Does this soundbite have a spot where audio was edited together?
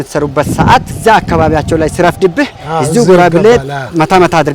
yes; 1 cut; at 0.9 s

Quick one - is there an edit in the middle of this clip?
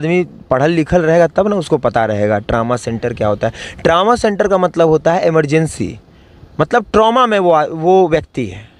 no; 0 cuts

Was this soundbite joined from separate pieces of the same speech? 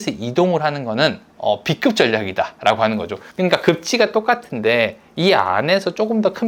no; 0 cuts

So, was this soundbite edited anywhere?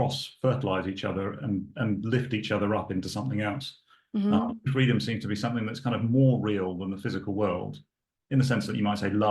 yes; 1 cut; at 4.7 s

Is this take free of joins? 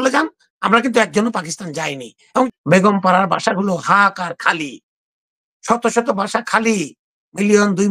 no; 1 cut; at 2.5 s

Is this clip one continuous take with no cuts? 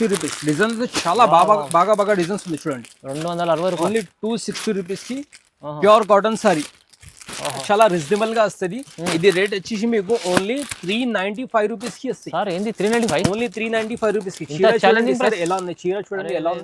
no; 1 cut; at 7.6 s

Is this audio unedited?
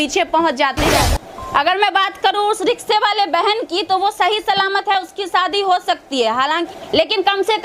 no; 2 cuts; at 0.9 s, 6.7 s

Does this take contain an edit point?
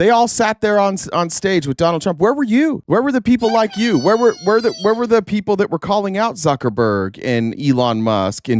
no; 0 cuts

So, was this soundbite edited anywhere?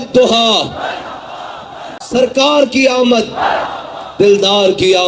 yes; 1 cut; at 2.1 s

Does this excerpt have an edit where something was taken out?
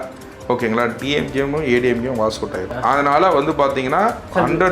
yes; 1 cut; at 2.7 s

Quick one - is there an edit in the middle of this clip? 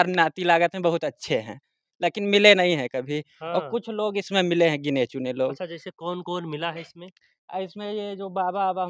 no; 0 cuts

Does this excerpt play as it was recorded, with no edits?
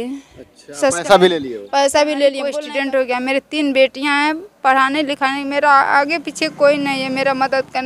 no; 1 cut; at 2.5 s

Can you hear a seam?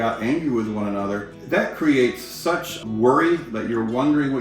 yes; 2 cuts; at 1.3 s, 2.8 s

